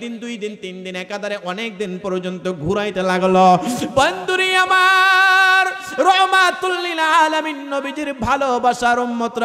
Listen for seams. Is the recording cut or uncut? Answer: uncut